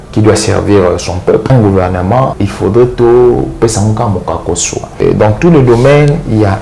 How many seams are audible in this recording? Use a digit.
3